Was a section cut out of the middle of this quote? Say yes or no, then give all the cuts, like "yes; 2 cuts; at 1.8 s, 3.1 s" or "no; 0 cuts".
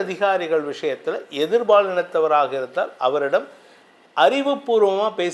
no; 0 cuts